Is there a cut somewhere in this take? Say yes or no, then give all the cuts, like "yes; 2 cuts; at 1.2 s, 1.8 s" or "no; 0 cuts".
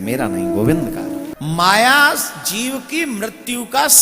yes; 1 cut; at 1.3 s